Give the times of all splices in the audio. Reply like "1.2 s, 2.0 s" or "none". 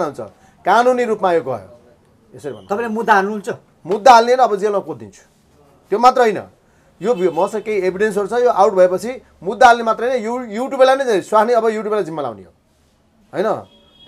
none